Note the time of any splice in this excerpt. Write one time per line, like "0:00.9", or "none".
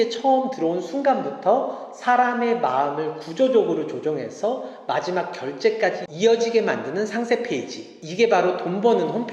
none